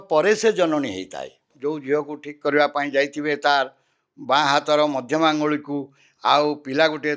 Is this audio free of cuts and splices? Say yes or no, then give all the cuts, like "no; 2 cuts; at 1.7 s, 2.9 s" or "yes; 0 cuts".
no; 1 cut; at 1.5 s